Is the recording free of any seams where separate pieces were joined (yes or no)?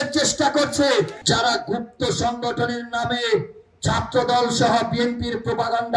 no